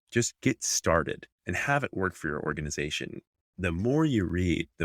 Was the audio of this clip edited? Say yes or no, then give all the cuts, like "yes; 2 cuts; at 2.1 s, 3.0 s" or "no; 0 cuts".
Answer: no; 0 cuts